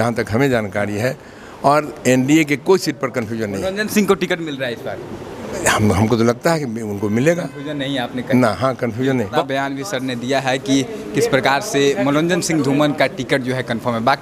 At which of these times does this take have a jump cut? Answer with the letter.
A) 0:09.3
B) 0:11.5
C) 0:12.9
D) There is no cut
A